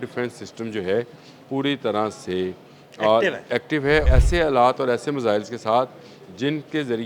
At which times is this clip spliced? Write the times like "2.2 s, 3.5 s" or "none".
4.1 s